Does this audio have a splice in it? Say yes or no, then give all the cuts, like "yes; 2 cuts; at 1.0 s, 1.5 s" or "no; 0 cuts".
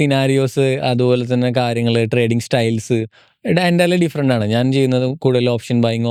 no; 0 cuts